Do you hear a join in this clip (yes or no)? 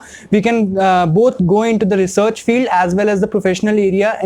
no